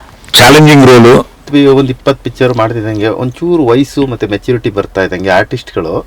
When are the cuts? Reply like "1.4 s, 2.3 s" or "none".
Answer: 1.4 s